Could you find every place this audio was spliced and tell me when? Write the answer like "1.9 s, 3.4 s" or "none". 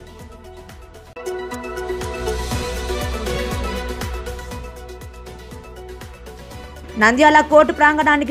none